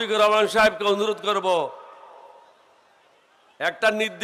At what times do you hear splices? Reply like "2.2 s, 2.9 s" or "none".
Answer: none